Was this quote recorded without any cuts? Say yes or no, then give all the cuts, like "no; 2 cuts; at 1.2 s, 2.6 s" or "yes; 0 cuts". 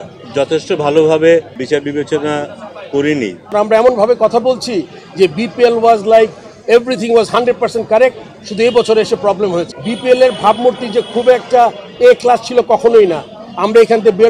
no; 3 cuts; at 1.6 s, 3.5 s, 9.7 s